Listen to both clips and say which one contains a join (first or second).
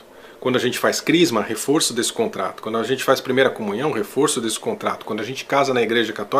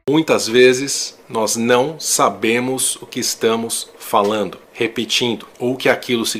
second